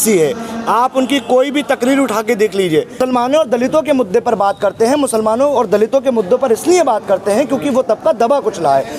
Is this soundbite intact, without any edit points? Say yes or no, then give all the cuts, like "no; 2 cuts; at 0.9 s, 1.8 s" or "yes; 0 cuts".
no; 1 cut; at 3.0 s